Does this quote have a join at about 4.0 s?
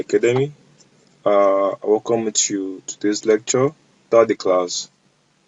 yes; 1 cut; at 4.0 s

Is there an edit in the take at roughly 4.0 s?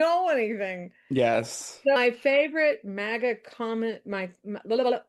no; 1 cut; at 2.0 s

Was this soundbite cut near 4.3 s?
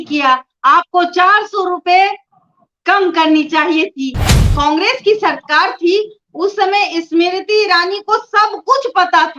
yes; 1 cut; at 4.3 s

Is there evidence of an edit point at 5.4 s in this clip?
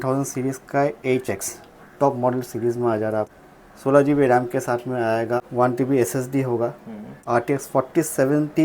yes; 3 cuts; at 3.3 s, 5.4 s, 7.1 s

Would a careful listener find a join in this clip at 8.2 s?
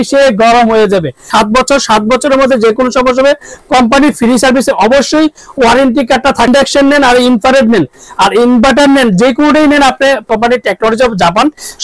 no; 3 cuts; at 1.3 s, 6.5 s, 10.2 s

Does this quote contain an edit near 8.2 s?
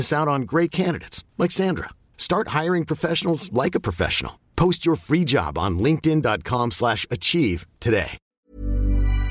yes; 1 cut; at 8.2 s

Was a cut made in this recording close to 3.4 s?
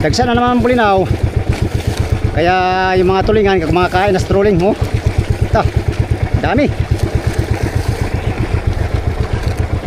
no; 0 cuts

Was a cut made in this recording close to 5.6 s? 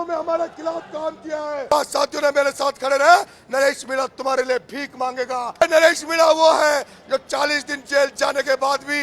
yes; 2 cuts; at 1.7 s, 5.6 s

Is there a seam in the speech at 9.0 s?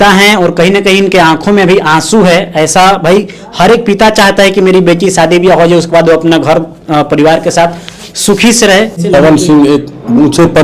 yes; 1 cut; at 9.0 s

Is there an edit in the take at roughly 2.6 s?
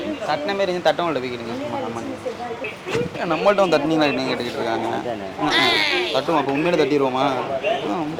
yes; 1 cut; at 2.6 s

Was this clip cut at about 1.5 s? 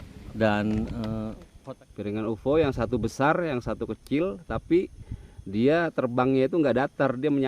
yes; 1 cut; at 1.5 s

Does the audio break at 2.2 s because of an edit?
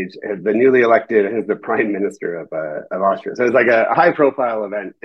no; 0 cuts

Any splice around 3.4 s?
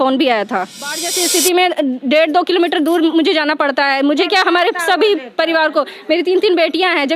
no; 1 cut; at 1.1 s

